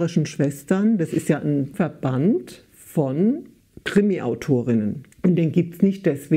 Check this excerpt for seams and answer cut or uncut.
cut